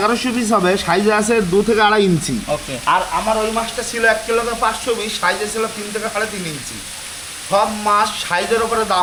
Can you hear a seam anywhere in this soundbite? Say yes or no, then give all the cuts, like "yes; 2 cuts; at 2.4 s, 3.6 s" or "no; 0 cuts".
no; 0 cuts